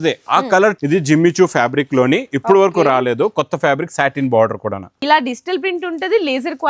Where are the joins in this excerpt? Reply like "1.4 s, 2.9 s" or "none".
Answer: 0.8 s, 4.9 s